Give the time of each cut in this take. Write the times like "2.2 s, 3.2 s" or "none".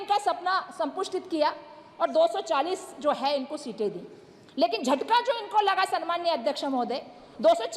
none